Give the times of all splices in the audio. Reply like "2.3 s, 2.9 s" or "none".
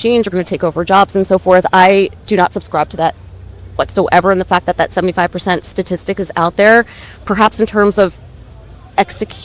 none

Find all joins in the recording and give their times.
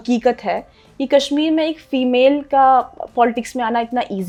none

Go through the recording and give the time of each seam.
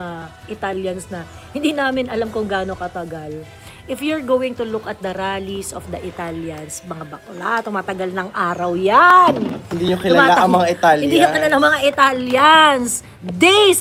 none

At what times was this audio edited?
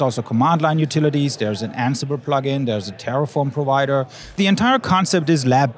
4.3 s

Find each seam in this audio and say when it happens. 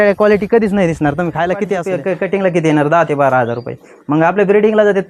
1.9 s

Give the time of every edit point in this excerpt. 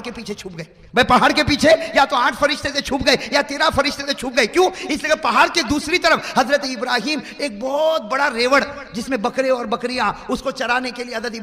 none

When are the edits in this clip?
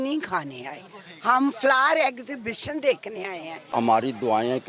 3.7 s

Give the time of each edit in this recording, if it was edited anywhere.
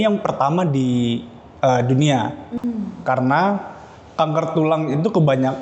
none

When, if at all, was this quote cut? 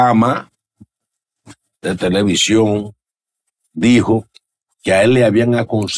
none

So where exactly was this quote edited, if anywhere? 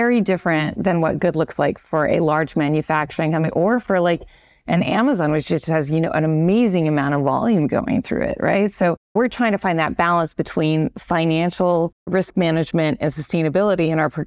9.1 s

